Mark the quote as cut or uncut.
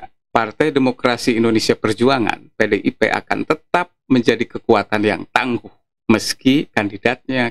uncut